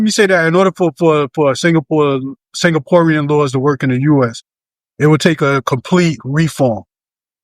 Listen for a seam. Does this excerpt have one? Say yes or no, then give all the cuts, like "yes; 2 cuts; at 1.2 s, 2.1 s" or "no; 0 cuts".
no; 0 cuts